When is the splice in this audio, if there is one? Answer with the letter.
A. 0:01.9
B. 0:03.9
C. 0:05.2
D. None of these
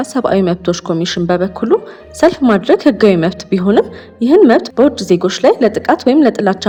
D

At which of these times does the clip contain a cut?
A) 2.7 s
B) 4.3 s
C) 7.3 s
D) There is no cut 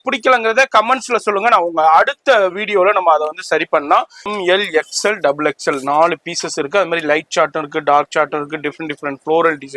B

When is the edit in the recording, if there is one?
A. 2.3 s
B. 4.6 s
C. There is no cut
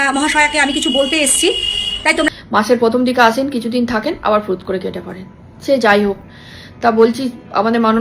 A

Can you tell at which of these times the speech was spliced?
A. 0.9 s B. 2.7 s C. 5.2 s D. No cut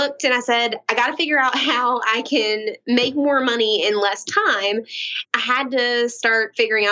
C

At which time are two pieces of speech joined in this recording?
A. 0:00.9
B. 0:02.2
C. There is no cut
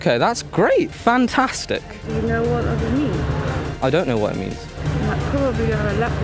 A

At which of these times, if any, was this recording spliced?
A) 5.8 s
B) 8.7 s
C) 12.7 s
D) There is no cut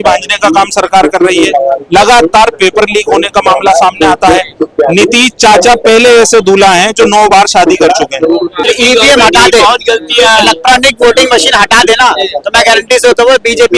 B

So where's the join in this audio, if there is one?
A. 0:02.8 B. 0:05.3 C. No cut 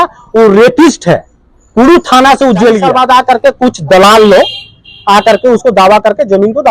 A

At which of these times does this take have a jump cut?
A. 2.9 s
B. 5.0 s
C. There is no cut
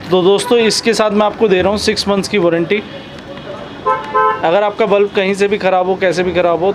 C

